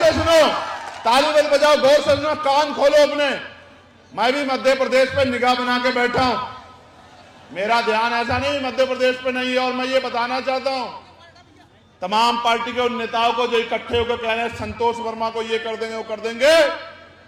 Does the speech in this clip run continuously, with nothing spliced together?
yes; 0 cuts

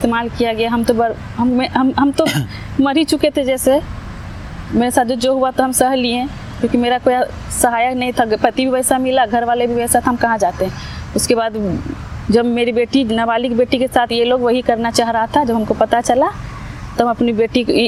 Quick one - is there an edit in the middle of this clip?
no; 0 cuts

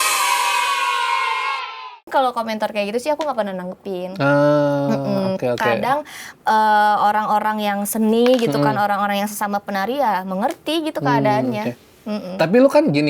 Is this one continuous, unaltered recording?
no; 1 cut; at 2.0 s

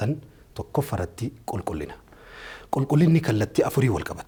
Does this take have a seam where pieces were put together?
no; 0 cuts

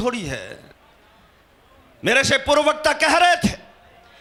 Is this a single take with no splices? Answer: yes; 0 cuts

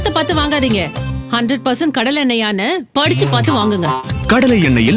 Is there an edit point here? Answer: no; 0 cuts

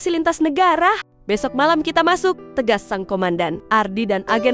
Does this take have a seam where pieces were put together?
yes; 2 cuts; at 1.1 s, 2.4 s

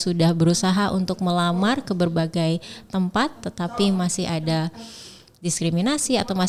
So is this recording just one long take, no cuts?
yes; 0 cuts

